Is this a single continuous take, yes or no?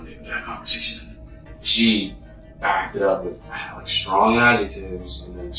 yes